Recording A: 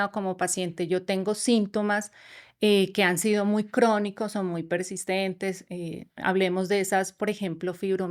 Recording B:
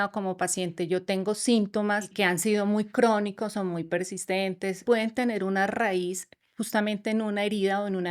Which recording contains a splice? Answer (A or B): B